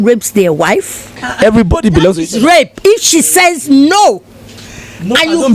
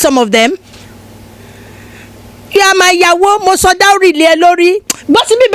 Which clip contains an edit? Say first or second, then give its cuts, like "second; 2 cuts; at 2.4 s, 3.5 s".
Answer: first; 1 cut; at 1.2 s